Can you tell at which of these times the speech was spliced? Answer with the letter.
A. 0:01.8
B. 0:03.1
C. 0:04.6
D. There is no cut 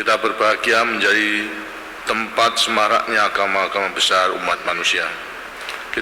D